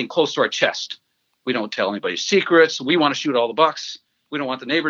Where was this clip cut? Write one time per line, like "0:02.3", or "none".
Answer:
none